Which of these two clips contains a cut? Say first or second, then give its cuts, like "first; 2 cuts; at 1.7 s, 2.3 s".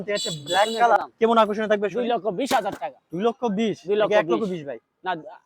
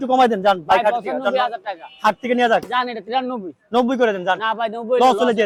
first; 1 cut; at 1.0 s